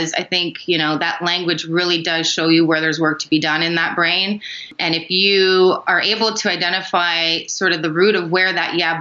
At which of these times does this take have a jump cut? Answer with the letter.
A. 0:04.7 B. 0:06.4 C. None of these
A